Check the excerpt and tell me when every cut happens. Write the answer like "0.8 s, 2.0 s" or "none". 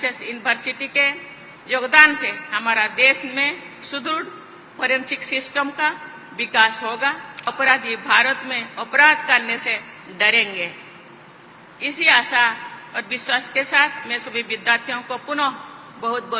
7.5 s